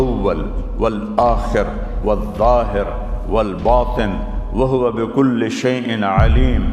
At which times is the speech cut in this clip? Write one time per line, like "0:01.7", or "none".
none